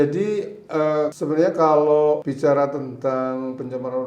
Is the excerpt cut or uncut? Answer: cut